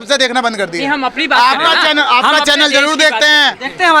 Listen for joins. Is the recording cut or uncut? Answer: uncut